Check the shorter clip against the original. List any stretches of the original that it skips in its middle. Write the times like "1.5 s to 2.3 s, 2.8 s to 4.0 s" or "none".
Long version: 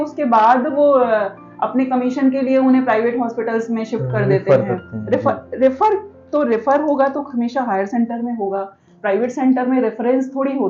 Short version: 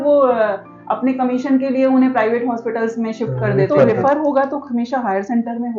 4.7 s to 6.6 s